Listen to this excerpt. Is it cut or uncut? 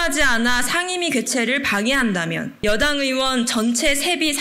cut